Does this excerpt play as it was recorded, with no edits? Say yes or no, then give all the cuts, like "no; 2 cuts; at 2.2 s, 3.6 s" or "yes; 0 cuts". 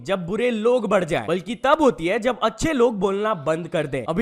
no; 1 cut; at 1.4 s